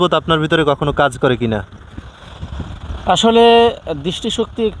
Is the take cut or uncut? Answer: uncut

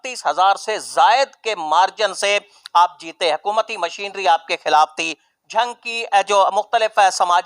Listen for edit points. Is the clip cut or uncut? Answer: uncut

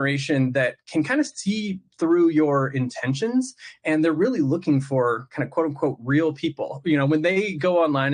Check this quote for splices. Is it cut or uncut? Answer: uncut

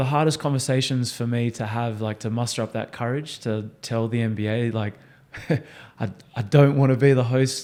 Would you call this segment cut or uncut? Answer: uncut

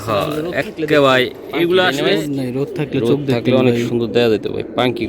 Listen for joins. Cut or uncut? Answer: cut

